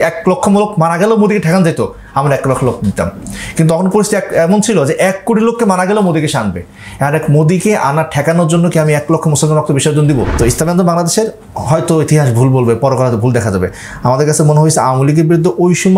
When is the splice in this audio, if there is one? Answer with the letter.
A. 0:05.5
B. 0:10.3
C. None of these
B